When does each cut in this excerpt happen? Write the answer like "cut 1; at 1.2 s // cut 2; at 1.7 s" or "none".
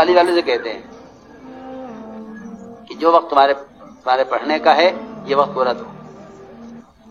cut 1; at 1.4 s // cut 2; at 2.8 s